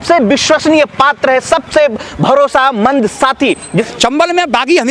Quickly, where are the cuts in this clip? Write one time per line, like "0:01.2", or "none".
0:03.9